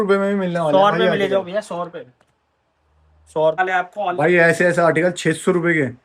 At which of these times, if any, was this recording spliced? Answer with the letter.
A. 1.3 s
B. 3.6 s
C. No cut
B